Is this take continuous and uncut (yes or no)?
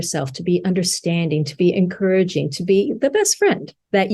yes